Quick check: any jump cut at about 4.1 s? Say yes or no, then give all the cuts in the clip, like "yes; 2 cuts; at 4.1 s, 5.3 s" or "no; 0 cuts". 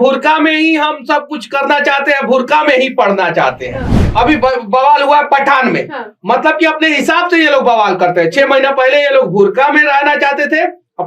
yes; 1 cut; at 4.1 s